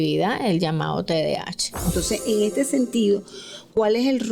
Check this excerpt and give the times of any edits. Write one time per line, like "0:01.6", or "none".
0:01.9